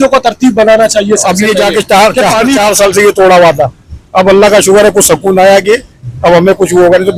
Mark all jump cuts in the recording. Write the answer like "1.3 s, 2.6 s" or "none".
1.2 s